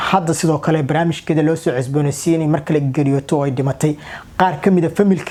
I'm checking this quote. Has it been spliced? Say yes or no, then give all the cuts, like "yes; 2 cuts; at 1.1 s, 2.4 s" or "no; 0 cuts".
no; 0 cuts